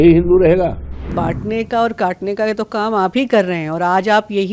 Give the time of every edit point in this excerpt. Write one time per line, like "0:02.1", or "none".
0:01.1